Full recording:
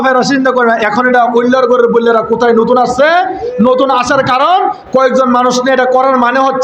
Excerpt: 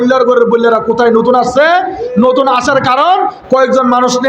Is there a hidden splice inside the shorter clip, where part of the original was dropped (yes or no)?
no